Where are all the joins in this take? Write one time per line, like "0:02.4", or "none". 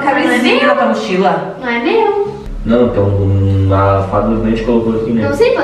0:02.5